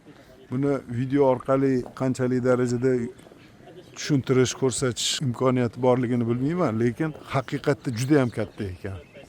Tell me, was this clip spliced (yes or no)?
yes